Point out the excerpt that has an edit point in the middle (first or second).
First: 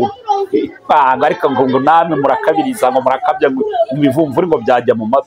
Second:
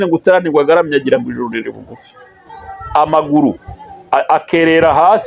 second